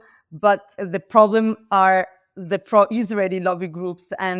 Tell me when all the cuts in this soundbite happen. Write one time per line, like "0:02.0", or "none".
0:00.9